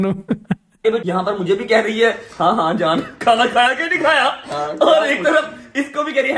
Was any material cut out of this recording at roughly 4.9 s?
no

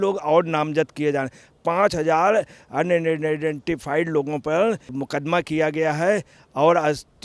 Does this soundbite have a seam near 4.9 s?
yes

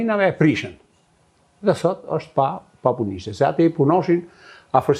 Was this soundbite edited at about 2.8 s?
no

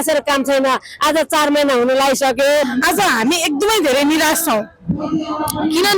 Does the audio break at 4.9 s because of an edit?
no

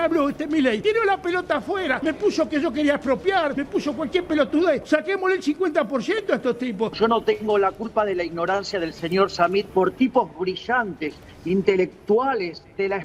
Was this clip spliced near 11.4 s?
no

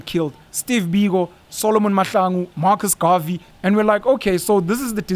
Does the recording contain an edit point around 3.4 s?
yes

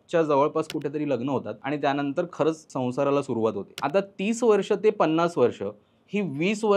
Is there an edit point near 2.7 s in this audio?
yes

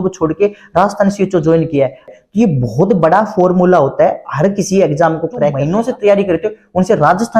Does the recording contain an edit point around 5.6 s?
yes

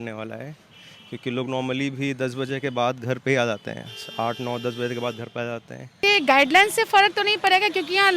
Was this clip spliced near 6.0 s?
yes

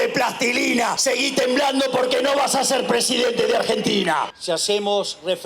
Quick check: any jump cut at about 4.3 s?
yes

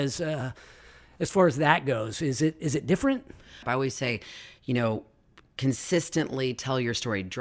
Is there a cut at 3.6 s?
yes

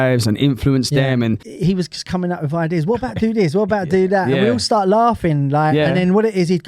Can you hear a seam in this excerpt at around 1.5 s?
yes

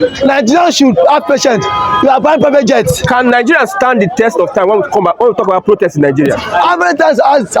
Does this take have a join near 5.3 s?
no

